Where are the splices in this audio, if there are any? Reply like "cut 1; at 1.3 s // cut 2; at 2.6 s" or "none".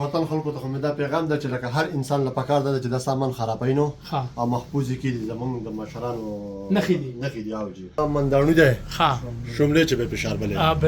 cut 1; at 8.0 s